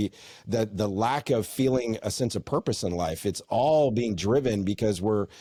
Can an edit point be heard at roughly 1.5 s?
no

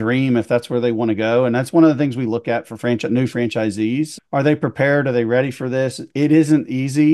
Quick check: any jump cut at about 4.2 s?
yes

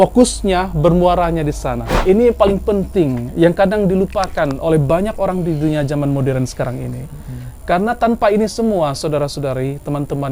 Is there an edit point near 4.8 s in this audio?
no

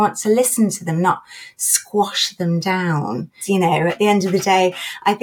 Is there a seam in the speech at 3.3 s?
yes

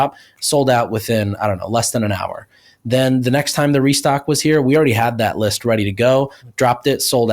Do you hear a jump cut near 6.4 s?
yes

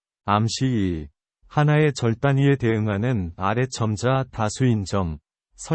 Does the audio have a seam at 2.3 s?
no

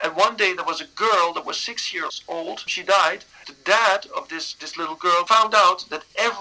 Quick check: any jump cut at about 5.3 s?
yes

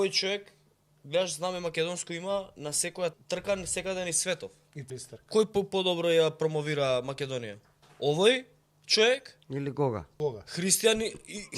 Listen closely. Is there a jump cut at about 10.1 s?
yes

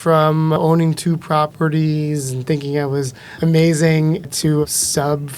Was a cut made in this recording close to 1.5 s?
no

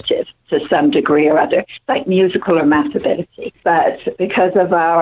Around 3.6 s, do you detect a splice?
yes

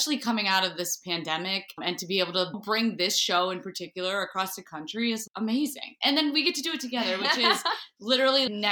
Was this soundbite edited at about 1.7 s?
no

